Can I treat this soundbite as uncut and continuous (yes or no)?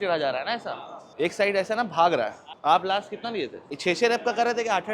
yes